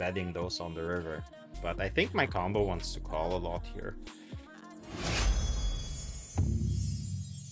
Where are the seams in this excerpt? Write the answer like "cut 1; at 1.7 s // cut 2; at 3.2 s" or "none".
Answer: cut 1; at 1.4 s // cut 2; at 4.8 s